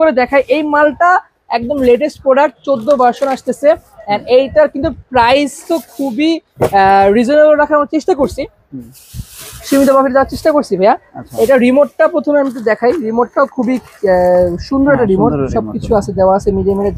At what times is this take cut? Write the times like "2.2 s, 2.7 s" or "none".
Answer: none